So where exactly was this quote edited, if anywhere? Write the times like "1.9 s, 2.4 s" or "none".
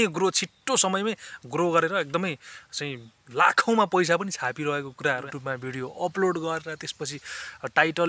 5.3 s

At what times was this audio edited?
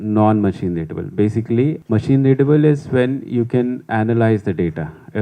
1.8 s

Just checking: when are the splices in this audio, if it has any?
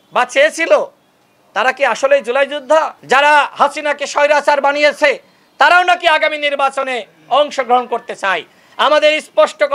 2.9 s

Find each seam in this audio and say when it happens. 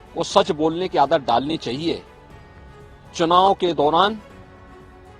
4.2 s

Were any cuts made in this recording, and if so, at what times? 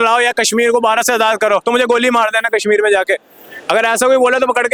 none

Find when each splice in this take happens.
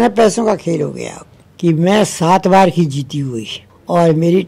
1.3 s

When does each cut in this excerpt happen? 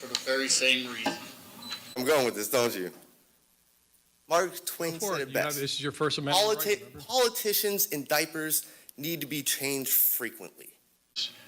2.0 s

